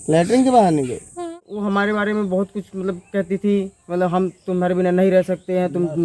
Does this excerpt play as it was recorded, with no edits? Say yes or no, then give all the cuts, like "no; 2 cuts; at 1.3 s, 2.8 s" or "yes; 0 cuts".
no; 1 cut; at 1.5 s